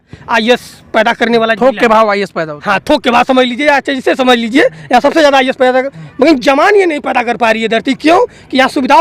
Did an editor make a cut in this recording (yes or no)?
no